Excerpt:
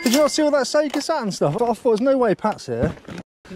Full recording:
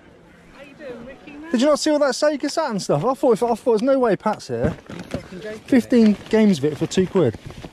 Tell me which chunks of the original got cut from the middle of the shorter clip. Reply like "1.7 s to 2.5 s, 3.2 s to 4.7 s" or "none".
3.0 s to 3.4 s